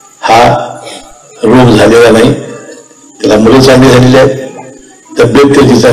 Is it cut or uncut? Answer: uncut